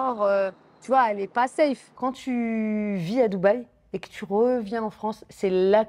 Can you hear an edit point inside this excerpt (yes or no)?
yes